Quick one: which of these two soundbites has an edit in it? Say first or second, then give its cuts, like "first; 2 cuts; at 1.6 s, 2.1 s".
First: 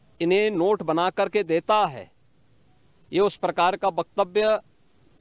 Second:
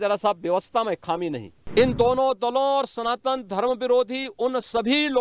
second; 1 cut; at 1.5 s